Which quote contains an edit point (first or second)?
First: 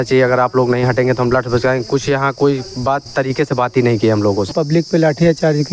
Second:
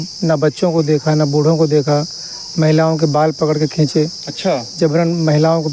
first